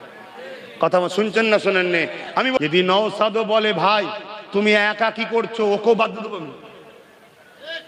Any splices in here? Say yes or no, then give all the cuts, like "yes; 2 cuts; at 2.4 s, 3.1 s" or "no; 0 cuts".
yes; 1 cut; at 2.6 s